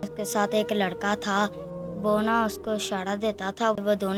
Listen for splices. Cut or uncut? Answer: uncut